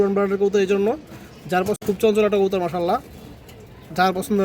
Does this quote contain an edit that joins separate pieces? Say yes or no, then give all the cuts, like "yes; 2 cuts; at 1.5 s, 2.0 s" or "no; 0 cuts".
yes; 1 cut; at 1.8 s